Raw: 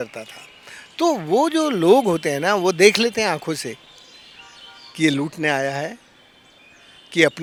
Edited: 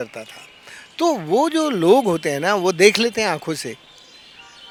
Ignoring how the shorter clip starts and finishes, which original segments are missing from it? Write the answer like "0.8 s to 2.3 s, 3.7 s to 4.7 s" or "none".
none